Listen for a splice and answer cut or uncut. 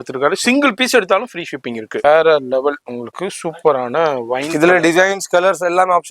cut